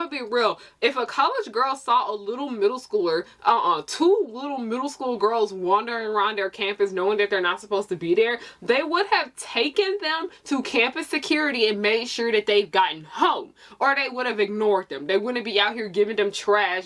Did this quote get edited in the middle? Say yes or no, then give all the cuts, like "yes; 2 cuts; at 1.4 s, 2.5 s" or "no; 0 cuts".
no; 0 cuts